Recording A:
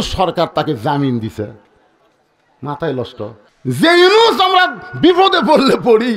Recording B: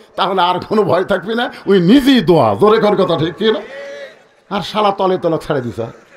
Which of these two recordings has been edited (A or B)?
A